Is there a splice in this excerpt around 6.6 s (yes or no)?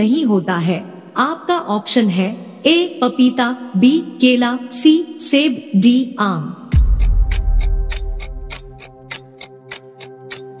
yes